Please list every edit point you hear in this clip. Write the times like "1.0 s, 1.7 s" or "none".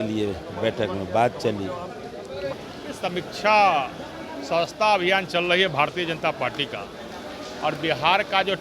2.5 s